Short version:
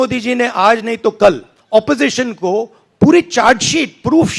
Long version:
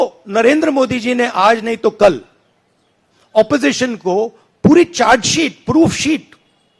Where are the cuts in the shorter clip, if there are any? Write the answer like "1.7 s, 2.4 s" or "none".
1.5 s